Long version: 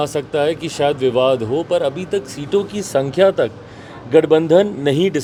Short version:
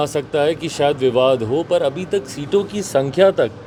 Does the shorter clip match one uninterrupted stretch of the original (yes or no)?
yes